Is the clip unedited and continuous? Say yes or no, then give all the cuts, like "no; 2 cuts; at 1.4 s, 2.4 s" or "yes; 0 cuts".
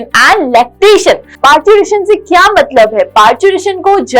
no; 1 cut; at 1.3 s